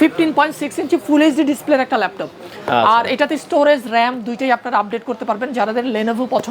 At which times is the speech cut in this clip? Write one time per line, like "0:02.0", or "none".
none